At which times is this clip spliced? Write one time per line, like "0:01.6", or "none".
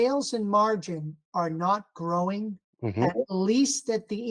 0:02.6